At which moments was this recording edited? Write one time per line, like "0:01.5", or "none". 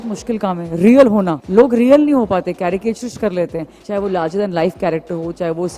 0:01.4
0:03.7

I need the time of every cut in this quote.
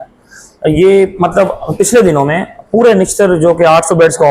none

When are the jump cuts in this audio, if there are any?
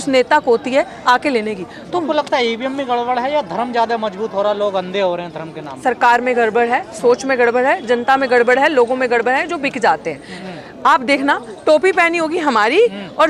0:02.0
0:10.3

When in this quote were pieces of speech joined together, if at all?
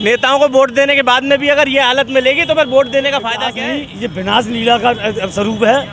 0:03.6

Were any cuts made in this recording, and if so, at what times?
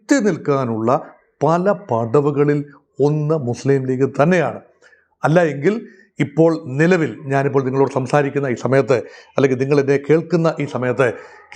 none

